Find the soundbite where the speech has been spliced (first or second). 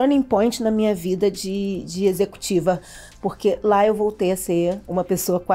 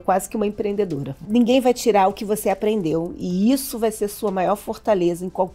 second